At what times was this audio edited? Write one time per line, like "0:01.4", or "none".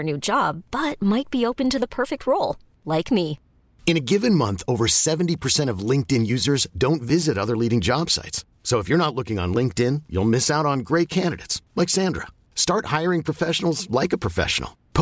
none